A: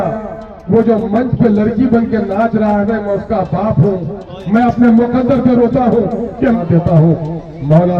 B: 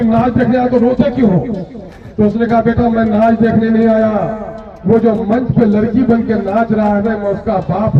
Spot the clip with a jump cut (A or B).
A